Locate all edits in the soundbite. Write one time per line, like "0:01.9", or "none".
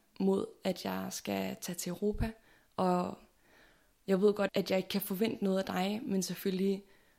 0:04.5